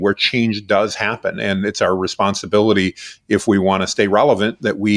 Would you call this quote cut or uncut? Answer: uncut